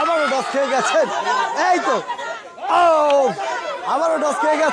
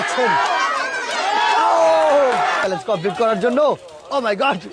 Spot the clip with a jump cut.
second; 1 cut; at 2.6 s

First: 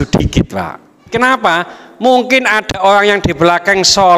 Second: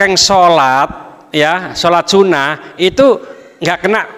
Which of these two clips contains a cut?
first; 1 cut; at 1.1 s

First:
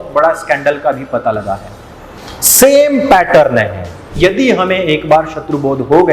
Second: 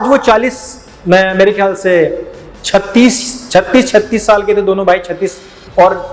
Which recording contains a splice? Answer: first; 1 cut; at 4.2 s

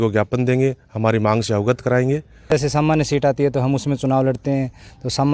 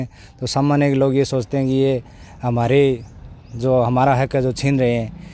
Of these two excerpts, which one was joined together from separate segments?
first; 1 cut; at 2.5 s

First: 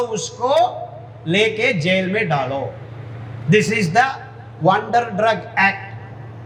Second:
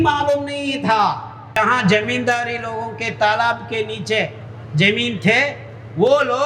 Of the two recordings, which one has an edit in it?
second; 1 cut; at 1.6 s

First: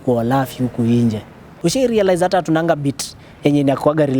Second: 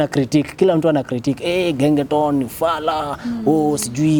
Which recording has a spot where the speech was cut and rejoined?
first; 1 cut; at 1.6 s

